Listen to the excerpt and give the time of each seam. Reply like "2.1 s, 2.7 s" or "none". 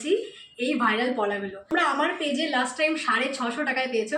1.7 s